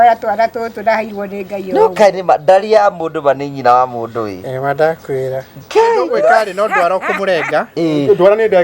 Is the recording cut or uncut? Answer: cut